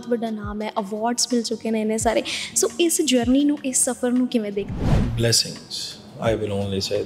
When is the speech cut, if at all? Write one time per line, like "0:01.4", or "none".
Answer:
0:04.9